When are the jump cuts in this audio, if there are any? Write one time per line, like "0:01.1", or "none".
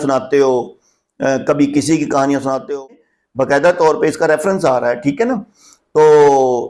0:03.0